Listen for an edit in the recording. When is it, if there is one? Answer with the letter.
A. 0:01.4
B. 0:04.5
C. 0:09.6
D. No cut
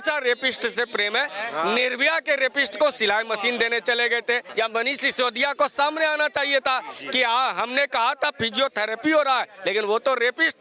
B